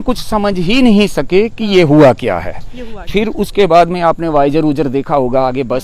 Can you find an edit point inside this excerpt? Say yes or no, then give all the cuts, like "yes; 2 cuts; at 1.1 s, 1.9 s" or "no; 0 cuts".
no; 0 cuts